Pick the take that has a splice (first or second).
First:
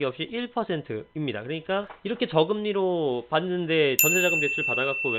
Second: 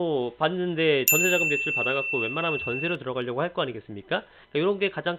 first